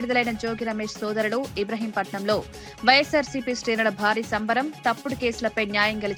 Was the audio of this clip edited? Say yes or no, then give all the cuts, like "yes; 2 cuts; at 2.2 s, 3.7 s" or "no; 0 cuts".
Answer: no; 0 cuts